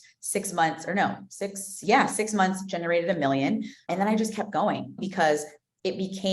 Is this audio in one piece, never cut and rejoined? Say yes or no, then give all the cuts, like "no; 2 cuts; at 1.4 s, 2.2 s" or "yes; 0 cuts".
no; 2 cuts; at 3.9 s, 5.0 s